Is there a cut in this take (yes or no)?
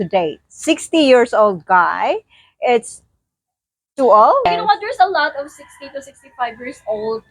yes